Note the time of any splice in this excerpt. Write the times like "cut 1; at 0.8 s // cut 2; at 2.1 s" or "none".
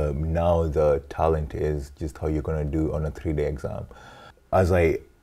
cut 1; at 4.3 s